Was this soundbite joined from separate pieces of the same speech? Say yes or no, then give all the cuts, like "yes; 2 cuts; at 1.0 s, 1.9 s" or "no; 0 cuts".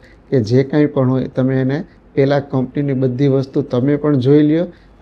no; 0 cuts